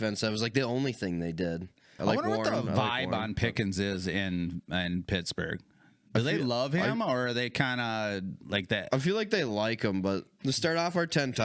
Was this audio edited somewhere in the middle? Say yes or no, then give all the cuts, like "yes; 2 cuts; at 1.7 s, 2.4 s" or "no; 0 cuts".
yes; 2 cuts; at 1.9 s, 10.3 s